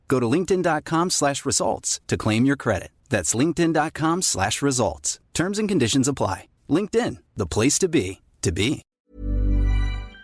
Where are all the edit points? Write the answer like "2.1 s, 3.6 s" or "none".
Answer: 8.8 s